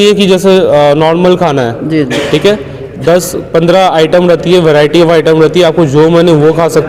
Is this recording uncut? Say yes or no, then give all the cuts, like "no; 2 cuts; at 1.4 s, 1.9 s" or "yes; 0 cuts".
yes; 0 cuts